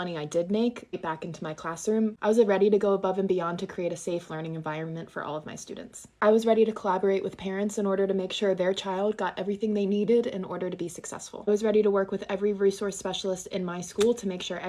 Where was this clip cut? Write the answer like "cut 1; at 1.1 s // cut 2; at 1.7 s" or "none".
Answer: none